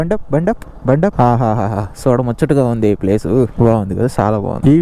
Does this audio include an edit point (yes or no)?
yes